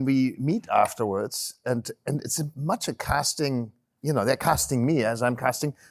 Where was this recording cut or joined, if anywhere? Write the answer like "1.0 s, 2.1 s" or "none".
3.8 s